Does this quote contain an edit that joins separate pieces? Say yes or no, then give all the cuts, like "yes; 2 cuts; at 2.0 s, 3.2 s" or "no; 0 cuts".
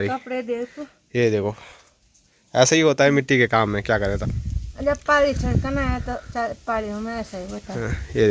no; 0 cuts